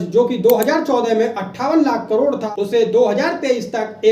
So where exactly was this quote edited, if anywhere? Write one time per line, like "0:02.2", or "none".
none